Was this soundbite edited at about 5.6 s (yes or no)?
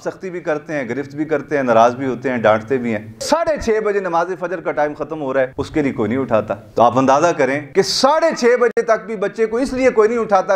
yes